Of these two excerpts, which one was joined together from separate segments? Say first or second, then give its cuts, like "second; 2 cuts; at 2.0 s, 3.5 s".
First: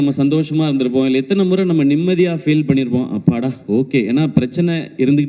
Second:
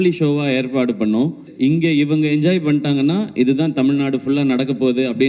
second; 1 cut; at 1.5 s